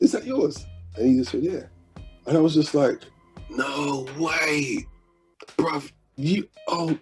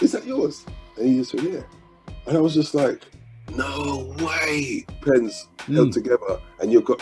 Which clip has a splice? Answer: second; 1 cut; at 5.0 s

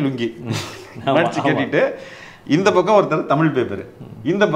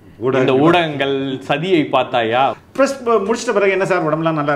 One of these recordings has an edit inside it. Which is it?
second; 1 cut; at 2.6 s

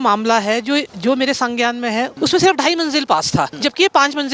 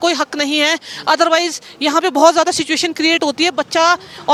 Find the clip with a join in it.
first; 3 cuts; at 0.9 s, 2.1 s, 3.5 s

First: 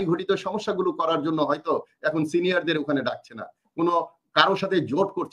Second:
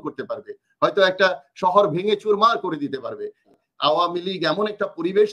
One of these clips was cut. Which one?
second; 1 cut; at 3.5 s

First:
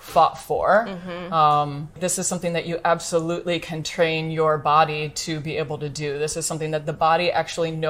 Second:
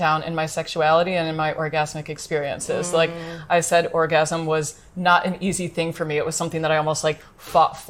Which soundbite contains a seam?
first; 1 cut; at 2.0 s

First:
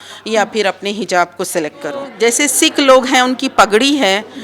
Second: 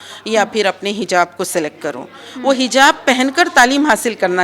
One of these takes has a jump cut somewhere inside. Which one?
first; 1 cut; at 2.1 s

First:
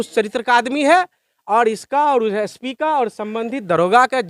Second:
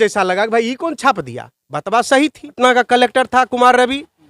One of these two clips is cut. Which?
second; 1 cut; at 2.6 s

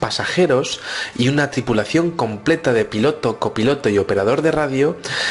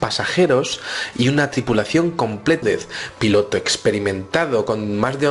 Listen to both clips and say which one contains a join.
first; 1 cut; at 2.6 s

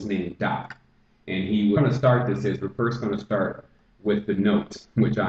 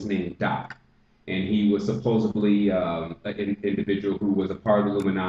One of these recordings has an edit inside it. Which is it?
second; 1 cut; at 1.8 s

